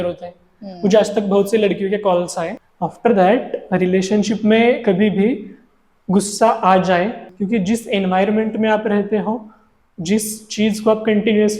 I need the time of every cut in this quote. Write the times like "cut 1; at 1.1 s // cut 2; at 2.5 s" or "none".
cut 1; at 2.6 s // cut 2; at 7.3 s